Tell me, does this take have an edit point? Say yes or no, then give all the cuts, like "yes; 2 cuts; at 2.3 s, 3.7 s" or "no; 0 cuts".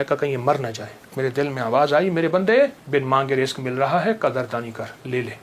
yes; 2 cuts; at 1.1 s, 2.8 s